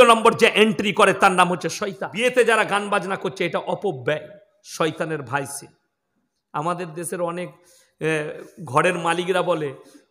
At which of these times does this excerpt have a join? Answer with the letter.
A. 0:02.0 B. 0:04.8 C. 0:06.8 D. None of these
A